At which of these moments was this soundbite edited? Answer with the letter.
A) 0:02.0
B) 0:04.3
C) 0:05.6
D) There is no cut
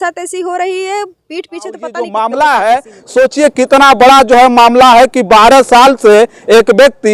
A